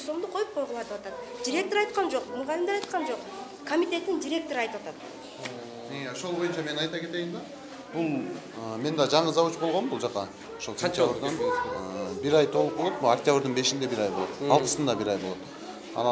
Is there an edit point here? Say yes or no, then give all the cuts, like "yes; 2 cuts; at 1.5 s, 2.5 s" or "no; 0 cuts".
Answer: no; 0 cuts